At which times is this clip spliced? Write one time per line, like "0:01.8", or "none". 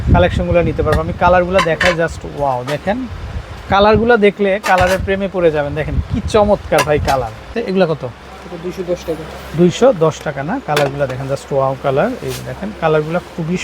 0:07.7